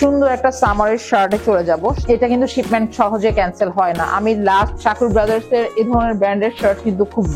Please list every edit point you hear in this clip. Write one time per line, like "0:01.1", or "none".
0:02.0
0:04.7